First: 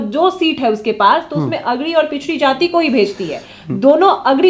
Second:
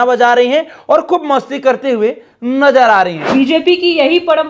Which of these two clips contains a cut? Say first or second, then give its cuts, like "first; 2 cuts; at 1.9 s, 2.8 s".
second; 1 cut; at 3.3 s